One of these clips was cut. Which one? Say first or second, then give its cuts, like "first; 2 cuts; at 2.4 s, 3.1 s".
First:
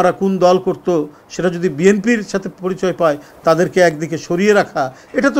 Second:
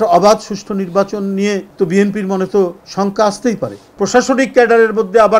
second; 3 cuts; at 1.7 s, 2.8 s, 3.8 s